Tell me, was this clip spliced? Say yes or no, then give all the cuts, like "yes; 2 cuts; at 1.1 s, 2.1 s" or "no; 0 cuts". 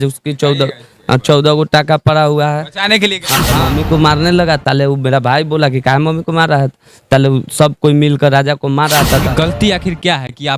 yes; 2 cuts; at 3.5 s, 9.3 s